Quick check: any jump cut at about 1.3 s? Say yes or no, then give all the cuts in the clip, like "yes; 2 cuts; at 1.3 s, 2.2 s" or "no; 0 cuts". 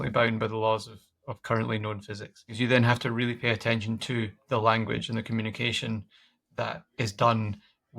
no; 1 cut; at 2.6 s